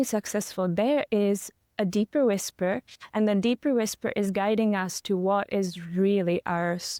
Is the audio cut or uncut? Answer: uncut